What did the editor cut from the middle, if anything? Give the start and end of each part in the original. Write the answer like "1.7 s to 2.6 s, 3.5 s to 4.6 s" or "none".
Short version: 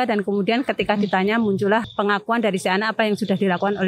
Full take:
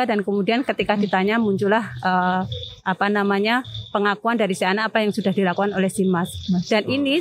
1.9 s to 3.9 s